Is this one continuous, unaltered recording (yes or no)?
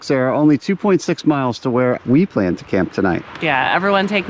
no